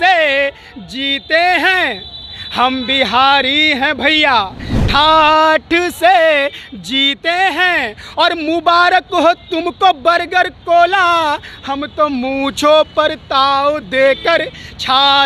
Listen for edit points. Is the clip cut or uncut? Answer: uncut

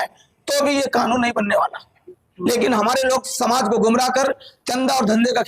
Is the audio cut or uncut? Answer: cut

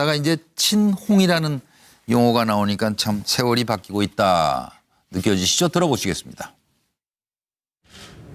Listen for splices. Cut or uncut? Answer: cut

